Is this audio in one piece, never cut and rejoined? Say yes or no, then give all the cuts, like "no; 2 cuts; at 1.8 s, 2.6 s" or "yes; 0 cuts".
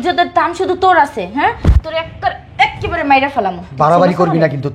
yes; 0 cuts